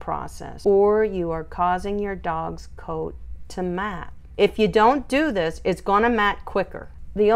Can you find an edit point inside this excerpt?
no; 0 cuts

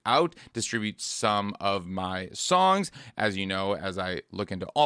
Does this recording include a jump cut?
no; 0 cuts

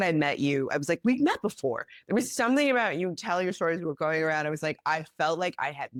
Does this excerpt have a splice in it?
no; 0 cuts

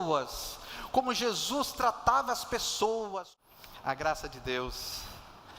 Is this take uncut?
no; 1 cut; at 3.3 s

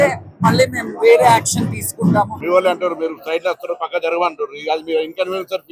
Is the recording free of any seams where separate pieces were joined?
no; 1 cut; at 2.4 s

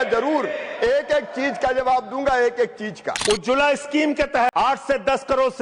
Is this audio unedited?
no; 2 cuts; at 3.1 s, 4.5 s

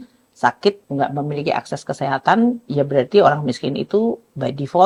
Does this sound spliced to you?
no; 0 cuts

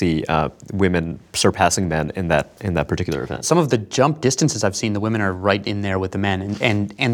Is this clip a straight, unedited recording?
no; 1 cut; at 3.4 s

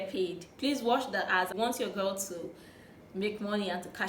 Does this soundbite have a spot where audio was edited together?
yes; 1 cut; at 1.5 s

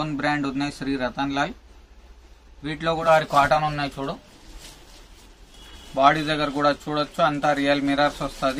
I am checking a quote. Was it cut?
yes; 1 cut; at 3.0 s

